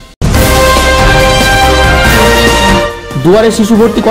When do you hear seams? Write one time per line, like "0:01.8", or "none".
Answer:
0:03.0